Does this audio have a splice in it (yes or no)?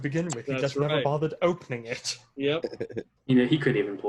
yes